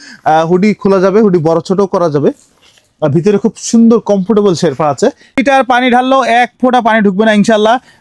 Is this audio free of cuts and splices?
no; 1 cut; at 5.4 s

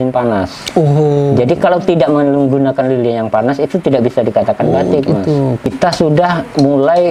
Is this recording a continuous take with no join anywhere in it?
no; 1 cut; at 5.7 s

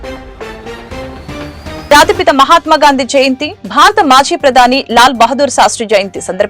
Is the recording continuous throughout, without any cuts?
no; 1 cut; at 1.9 s

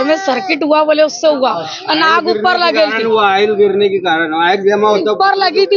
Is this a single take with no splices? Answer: yes; 0 cuts

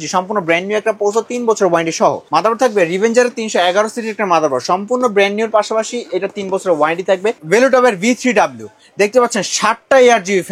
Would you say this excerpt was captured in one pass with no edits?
no; 2 cuts; at 2.2 s, 7.4 s

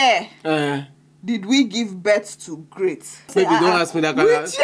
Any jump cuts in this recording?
yes; 1 cut; at 3.3 s

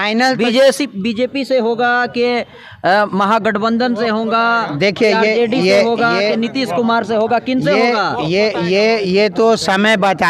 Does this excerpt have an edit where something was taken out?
no; 0 cuts

